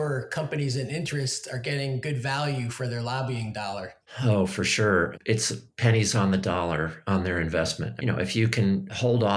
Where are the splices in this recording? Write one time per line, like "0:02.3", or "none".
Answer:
none